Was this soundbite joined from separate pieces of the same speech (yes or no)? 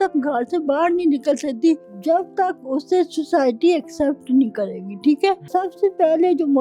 yes